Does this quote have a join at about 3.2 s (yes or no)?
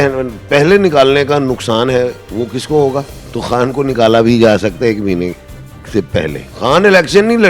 yes